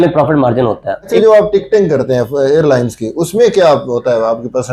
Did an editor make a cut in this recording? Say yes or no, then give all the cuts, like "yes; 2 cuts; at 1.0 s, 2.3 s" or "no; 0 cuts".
yes; 1 cut; at 1.2 s